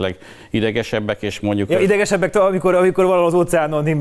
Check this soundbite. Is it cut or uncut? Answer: uncut